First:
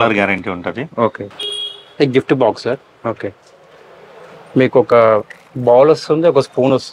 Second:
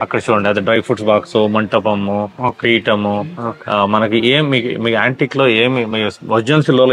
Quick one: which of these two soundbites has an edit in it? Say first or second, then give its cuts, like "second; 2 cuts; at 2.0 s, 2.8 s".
first; 1 cut; at 1.3 s